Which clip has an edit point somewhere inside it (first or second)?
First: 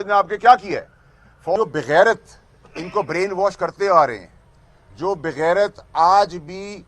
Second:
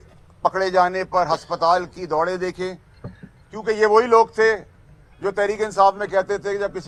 first